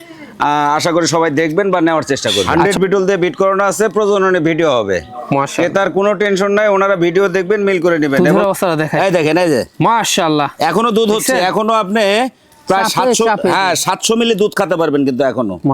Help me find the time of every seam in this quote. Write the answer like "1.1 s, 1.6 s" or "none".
2.5 s, 8.1 s